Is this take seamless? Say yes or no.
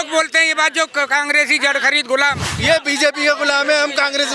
no